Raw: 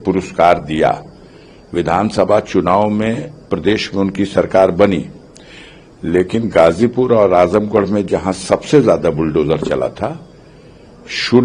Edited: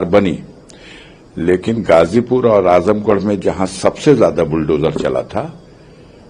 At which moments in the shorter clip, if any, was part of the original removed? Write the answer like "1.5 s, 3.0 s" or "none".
none